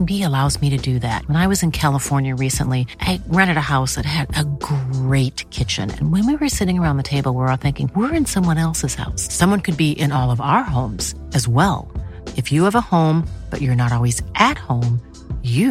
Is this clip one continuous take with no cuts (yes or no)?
yes